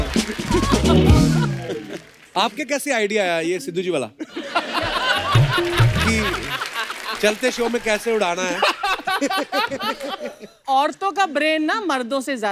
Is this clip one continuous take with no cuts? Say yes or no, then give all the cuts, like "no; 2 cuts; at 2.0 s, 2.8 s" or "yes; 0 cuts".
yes; 0 cuts